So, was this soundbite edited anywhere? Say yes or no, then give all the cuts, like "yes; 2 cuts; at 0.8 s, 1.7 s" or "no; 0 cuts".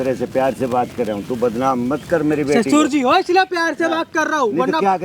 no; 0 cuts